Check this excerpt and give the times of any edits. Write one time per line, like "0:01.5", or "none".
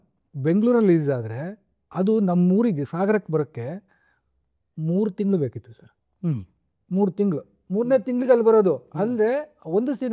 none

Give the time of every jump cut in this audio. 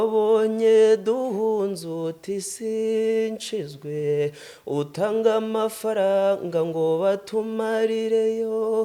none

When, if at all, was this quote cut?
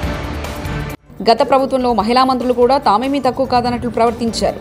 none

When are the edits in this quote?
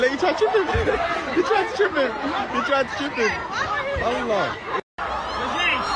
0:04.9

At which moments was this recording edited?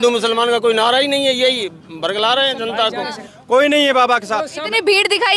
0:03.3

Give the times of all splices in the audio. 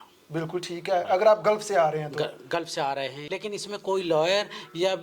0:03.2

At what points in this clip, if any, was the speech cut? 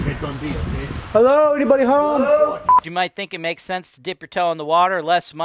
0:02.8

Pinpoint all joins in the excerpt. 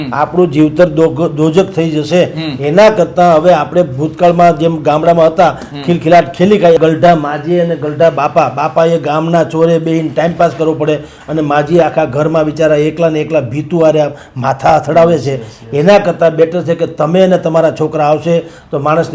0:06.8

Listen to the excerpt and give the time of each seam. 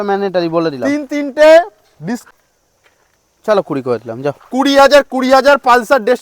0:02.3

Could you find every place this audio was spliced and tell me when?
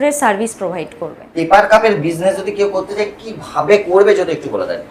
none

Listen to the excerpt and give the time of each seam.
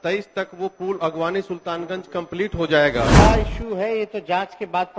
0:03.1

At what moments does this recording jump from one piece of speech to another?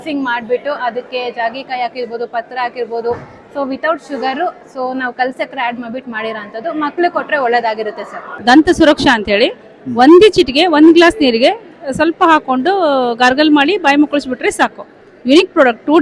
0:08.3

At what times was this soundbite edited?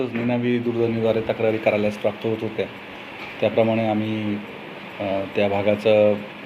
none

